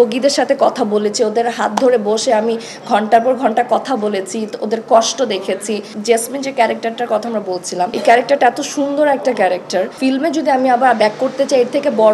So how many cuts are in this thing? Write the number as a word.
three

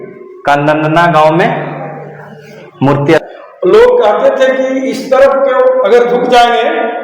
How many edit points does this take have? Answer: one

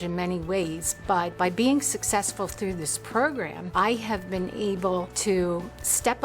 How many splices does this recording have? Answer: three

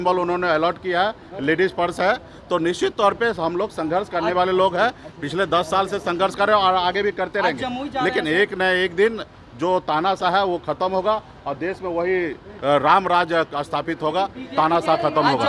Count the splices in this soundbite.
zero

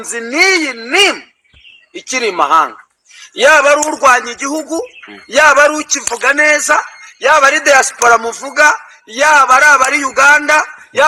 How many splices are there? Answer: zero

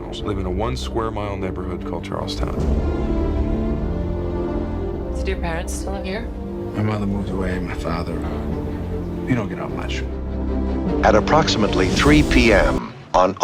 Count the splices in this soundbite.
zero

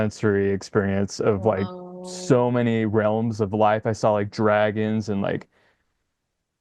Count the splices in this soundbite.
zero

